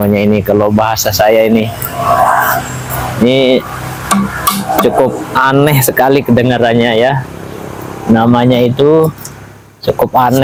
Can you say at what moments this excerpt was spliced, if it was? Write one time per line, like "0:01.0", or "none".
none

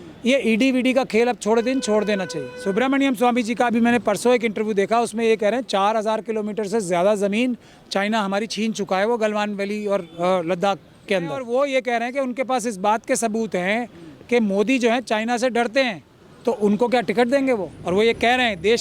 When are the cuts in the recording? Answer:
0:02.4
0:11.4
0:17.7

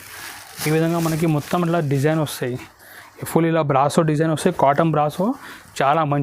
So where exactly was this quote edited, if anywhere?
none

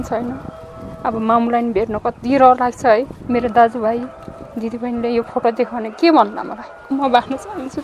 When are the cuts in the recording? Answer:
0:03.2
0:06.9

